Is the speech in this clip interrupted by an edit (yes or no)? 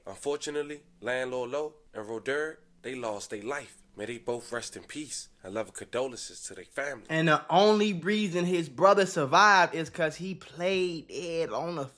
no